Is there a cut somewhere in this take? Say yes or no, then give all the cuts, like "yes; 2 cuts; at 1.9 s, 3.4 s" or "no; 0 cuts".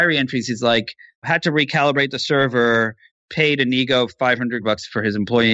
yes; 2 cuts; at 1.3 s, 4.6 s